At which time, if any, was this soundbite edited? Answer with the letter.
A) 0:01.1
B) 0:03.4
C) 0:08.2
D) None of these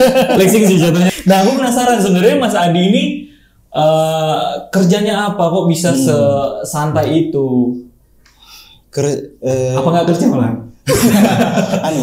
A